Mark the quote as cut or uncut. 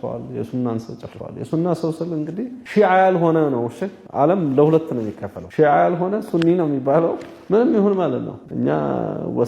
cut